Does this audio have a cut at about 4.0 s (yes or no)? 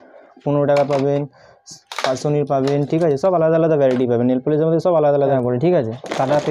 no